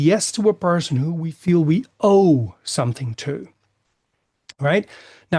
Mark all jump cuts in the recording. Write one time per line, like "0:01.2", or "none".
none